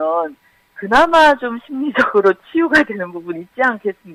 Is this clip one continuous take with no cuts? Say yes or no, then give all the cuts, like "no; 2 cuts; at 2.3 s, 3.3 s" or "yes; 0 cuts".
yes; 0 cuts